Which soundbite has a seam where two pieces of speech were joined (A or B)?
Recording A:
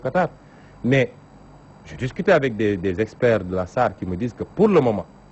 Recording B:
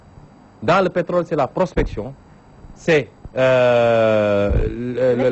B